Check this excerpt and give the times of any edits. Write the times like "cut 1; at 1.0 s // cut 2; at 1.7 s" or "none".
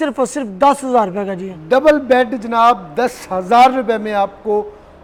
none